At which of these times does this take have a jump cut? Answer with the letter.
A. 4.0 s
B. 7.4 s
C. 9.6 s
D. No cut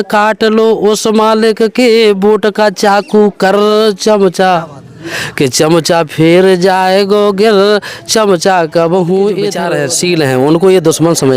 C